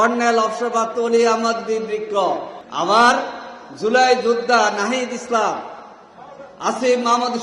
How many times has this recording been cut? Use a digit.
1